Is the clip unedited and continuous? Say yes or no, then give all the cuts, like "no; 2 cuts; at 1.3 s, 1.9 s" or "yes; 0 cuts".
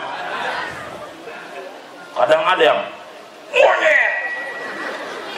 yes; 0 cuts